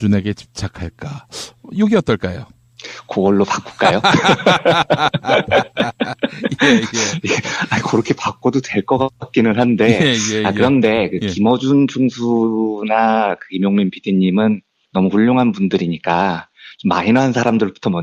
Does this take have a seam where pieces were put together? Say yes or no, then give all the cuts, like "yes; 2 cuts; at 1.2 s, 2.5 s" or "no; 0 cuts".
no; 0 cuts